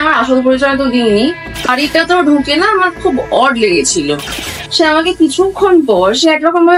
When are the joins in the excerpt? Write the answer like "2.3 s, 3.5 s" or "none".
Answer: 1.7 s, 4.3 s

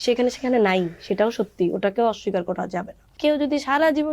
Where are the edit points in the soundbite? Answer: 3.0 s

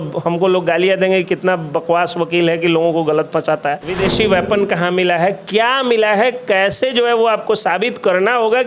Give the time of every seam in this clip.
3.9 s

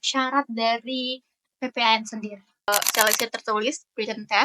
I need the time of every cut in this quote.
2.7 s

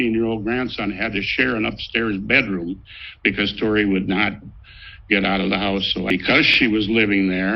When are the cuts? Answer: 6.4 s

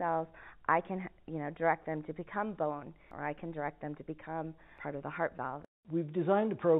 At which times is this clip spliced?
3.1 s, 4.7 s, 5.7 s

